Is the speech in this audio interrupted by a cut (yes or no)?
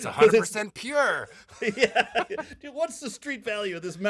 no